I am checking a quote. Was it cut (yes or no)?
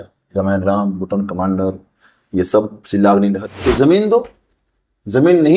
yes